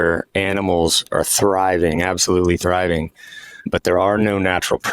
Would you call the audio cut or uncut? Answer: uncut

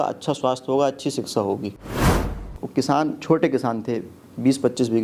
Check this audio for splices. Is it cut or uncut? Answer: cut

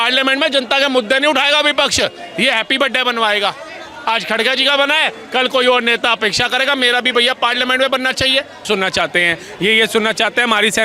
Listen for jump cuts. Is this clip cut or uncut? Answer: cut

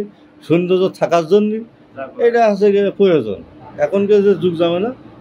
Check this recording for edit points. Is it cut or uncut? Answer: uncut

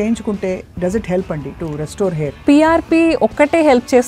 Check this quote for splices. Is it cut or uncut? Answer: uncut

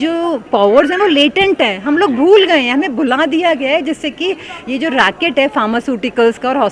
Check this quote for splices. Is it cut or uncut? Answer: uncut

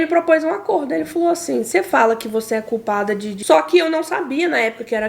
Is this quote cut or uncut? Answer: cut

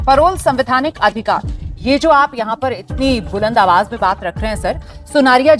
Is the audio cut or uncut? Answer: uncut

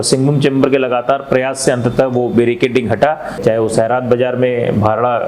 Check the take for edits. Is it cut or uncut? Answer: cut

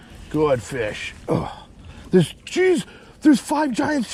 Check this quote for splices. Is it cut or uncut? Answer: uncut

